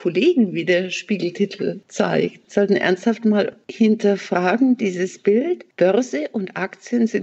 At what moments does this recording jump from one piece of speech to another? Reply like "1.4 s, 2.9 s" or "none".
2.1 s, 3.6 s, 5.7 s